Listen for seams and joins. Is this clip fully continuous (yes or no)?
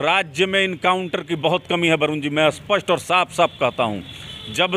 yes